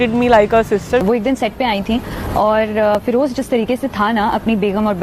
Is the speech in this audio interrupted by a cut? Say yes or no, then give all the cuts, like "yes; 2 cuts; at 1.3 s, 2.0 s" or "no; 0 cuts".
yes; 1 cut; at 1.0 s